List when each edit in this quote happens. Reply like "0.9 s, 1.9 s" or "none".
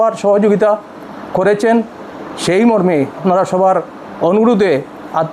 3.2 s